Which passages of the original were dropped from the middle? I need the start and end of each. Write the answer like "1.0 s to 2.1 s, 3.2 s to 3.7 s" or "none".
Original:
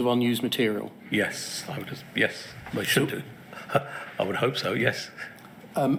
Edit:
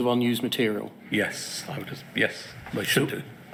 none